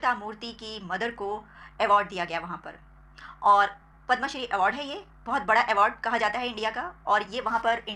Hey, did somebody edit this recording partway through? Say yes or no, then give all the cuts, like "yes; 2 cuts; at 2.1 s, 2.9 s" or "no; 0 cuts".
no; 0 cuts